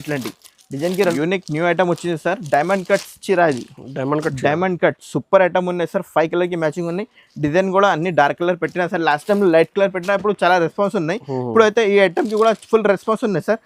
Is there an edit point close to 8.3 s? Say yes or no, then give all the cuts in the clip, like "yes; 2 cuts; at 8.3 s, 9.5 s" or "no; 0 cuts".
no; 1 cut; at 1.1 s